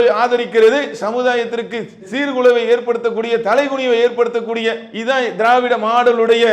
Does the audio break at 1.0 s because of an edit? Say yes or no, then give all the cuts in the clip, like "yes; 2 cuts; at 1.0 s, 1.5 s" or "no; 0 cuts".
yes; 1 cut; at 1.0 s